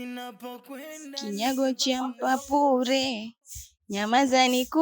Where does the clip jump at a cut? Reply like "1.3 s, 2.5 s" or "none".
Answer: 0.9 s